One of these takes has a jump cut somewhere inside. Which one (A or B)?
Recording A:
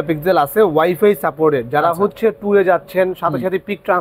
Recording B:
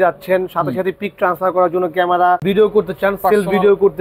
B